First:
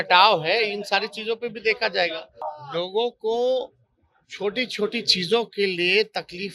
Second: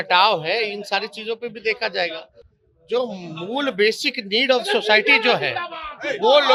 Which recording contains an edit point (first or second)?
first